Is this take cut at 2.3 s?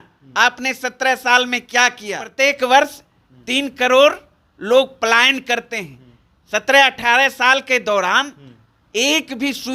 yes; 1 cut; at 2.3 s

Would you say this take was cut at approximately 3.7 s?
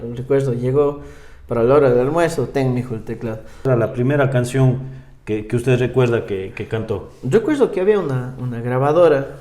yes; 1 cut; at 3.7 s

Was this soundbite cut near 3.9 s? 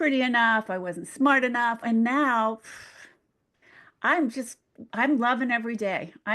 no; 1 cut; at 1.8 s

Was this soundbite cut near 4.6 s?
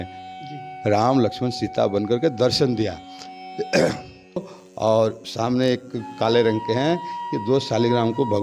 yes; 1 cut; at 4.6 s

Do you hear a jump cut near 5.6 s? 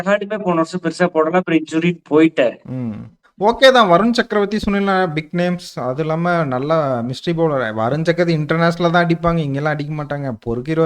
no; 1 cut; at 3.0 s

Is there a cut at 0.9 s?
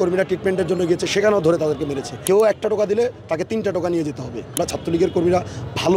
no; 2 cuts; at 2.2 s, 4.6 s

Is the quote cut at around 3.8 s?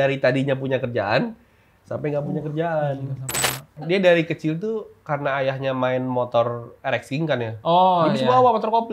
yes; 1 cut; at 3.8 s

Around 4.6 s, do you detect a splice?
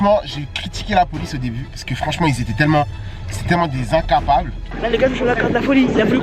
yes; 1 cut; at 4.6 s

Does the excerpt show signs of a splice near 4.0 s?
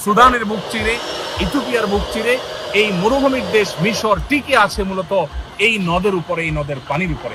no; 1 cut; at 2.5 s

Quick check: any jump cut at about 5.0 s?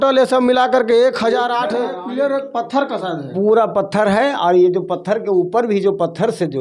no; 1 cut; at 1.8 s

